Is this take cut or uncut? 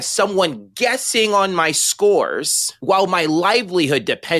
uncut